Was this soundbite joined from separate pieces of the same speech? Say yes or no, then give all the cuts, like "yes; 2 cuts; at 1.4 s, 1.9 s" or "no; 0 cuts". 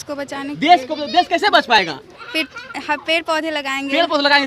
no; 0 cuts